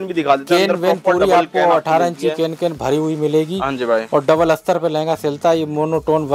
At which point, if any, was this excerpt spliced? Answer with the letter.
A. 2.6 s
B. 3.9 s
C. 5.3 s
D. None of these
D